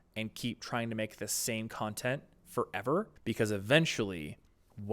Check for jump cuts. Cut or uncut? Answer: cut